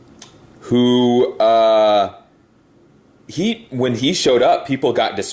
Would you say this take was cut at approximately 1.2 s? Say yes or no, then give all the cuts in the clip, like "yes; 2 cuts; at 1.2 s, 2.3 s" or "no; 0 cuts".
yes; 1 cut; at 1.2 s